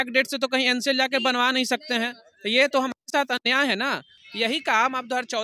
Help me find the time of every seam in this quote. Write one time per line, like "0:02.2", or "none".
0:04.1